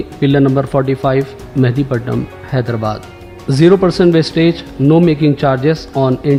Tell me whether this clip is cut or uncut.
uncut